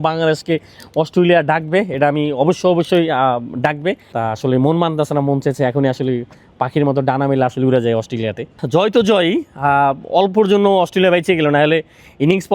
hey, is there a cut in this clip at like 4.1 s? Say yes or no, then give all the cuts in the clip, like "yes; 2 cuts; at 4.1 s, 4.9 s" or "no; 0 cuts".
yes; 2 cuts; at 4.1 s, 8.6 s